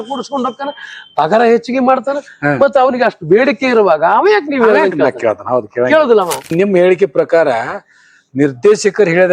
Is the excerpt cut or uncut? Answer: cut